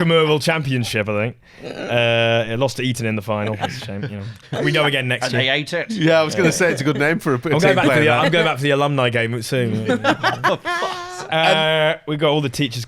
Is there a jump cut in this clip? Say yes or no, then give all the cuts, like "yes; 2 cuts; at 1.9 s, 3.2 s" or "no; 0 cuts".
no; 0 cuts